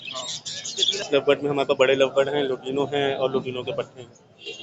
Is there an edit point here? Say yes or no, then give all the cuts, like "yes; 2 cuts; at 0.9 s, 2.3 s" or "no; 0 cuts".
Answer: yes; 1 cut; at 1.0 s